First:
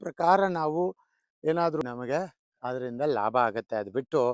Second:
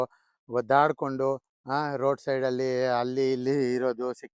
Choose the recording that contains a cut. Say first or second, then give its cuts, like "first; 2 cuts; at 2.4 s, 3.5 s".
first; 1 cut; at 1.8 s